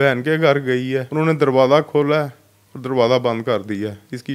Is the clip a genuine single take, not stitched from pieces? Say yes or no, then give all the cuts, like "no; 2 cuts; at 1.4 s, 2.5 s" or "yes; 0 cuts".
no; 1 cut; at 1.1 s